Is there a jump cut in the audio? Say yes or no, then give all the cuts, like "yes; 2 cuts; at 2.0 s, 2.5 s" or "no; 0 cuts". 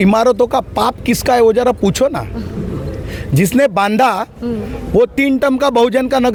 no; 0 cuts